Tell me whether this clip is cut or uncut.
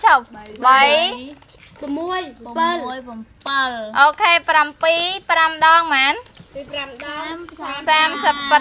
uncut